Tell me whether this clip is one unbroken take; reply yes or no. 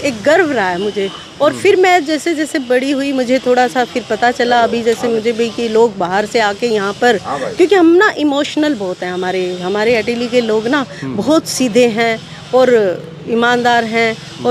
yes